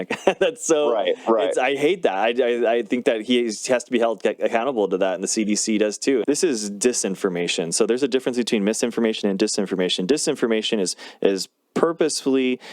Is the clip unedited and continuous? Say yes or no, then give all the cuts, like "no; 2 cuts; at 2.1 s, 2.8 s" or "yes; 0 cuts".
no; 1 cut; at 6.2 s